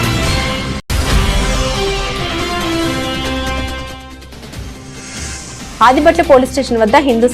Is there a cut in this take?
yes; 1 cut; at 5.6 s

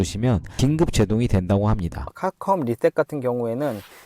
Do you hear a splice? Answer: yes; 1 cut; at 2.1 s

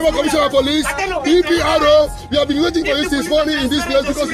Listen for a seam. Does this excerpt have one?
no; 0 cuts

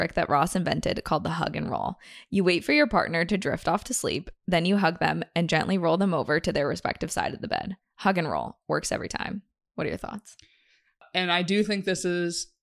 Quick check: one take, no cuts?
no; 1 cut; at 11.0 s

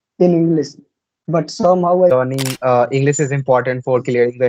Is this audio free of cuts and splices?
no; 1 cut; at 2.1 s

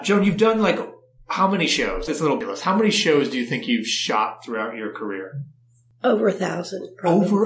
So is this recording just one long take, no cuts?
no; 1 cut; at 2.1 s

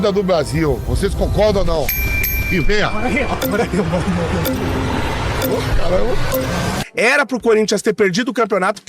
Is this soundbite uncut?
no; 1 cut; at 6.8 s

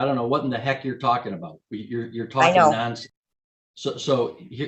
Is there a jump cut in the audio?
no; 0 cuts

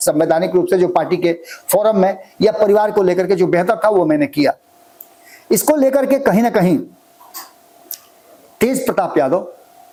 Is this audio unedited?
yes; 0 cuts

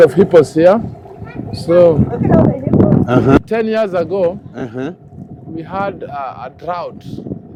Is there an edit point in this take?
no; 0 cuts

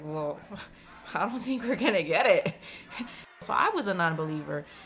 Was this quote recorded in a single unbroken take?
no; 1 cut; at 3.3 s

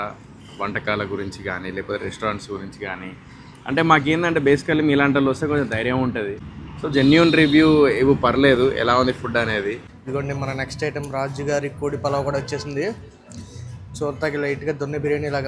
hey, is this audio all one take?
no; 2 cuts; at 6.4 s, 9.9 s

